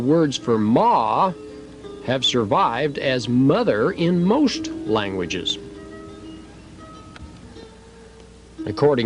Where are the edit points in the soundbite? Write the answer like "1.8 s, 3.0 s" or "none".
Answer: none